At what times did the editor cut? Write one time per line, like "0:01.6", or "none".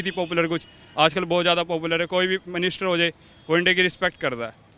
none